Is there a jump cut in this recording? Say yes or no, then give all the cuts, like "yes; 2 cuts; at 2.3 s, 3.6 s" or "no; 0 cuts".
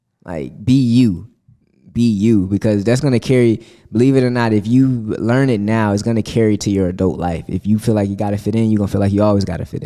no; 0 cuts